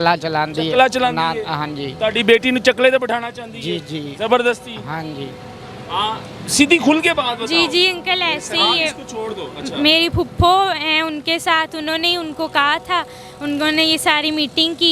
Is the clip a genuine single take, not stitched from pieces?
yes; 0 cuts

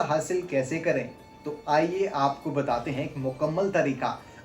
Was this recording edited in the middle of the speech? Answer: no; 0 cuts

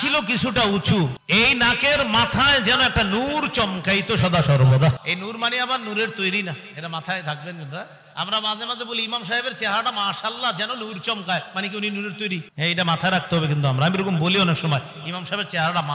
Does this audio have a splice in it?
yes; 3 cuts; at 1.2 s, 5.0 s, 12.5 s

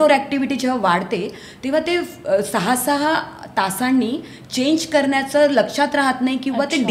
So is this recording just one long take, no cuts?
yes; 0 cuts

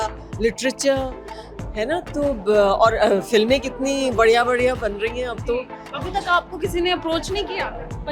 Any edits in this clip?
yes; 1 cut; at 5.9 s

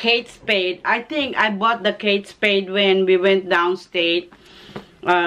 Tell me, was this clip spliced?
no; 0 cuts

